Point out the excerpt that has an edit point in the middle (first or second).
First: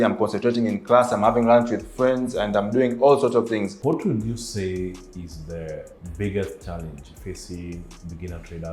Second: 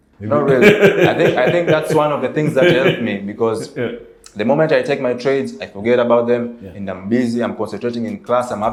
first